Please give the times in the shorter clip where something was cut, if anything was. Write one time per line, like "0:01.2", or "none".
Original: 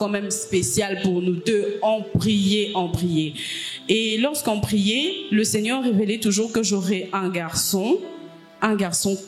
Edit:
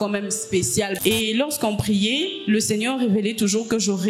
0:00.9

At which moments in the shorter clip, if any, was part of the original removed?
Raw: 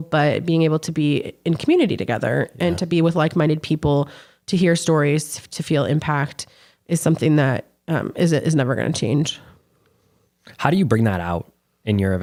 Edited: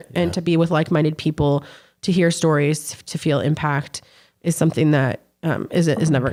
none

